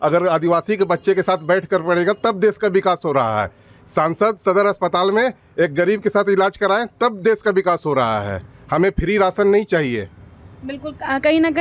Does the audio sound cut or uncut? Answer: uncut